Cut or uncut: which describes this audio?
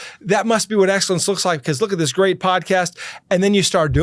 uncut